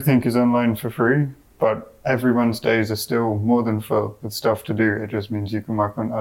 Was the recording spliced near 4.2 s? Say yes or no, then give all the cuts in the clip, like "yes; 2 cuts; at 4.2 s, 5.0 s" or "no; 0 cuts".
no; 0 cuts